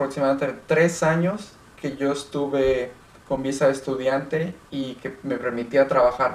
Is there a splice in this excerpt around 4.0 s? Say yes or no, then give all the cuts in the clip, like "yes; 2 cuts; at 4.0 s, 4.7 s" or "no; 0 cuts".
no; 0 cuts